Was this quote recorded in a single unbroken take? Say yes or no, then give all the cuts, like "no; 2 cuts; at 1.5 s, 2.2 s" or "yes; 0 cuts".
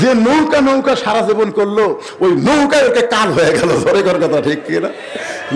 yes; 0 cuts